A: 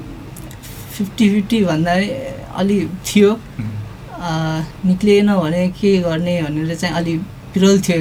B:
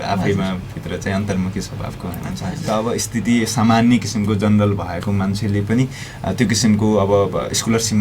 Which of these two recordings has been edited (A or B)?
B